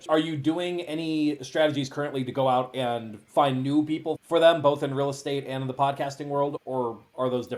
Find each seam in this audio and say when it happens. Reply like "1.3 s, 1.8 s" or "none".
none

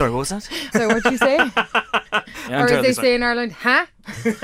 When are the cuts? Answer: 2.4 s

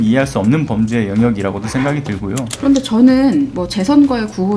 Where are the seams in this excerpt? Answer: 2.5 s

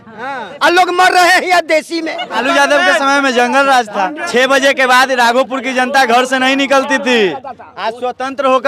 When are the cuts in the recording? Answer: 2.4 s, 4.2 s

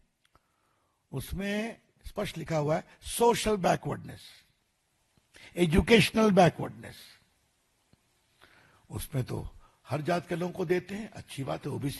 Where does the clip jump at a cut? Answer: none

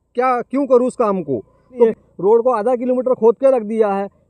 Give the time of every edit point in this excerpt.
1.8 s

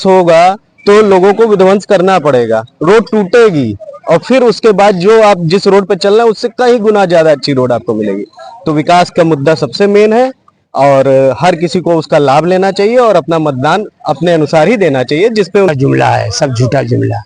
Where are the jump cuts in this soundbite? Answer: 15.7 s

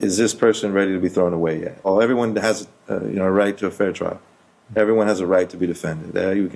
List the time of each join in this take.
1.9 s

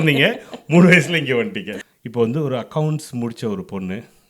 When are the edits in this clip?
1.7 s

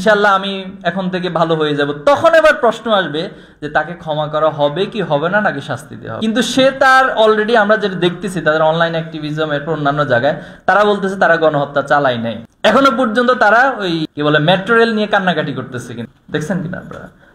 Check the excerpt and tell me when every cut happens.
none

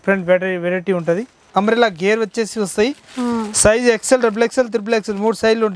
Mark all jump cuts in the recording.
1.4 s

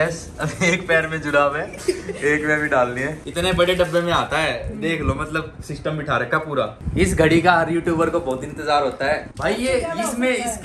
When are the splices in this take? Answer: 3.2 s, 6.7 s, 9.2 s

